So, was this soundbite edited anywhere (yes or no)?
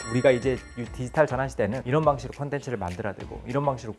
yes